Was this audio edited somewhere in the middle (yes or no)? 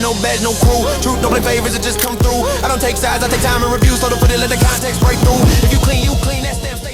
no